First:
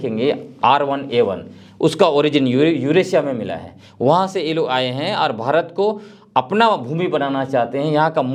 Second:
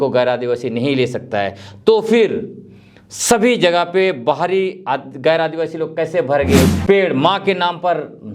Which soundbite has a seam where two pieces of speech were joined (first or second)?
second